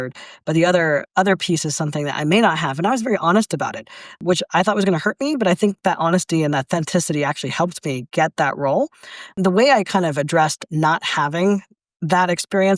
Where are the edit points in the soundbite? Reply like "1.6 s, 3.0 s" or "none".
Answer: 4.2 s, 9.3 s